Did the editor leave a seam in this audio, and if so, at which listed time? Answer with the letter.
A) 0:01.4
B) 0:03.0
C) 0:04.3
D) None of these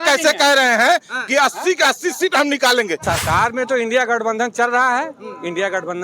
B